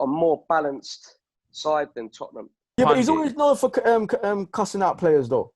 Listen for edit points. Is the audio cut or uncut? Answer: cut